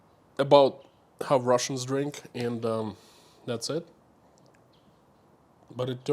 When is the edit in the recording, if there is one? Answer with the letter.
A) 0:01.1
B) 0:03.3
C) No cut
C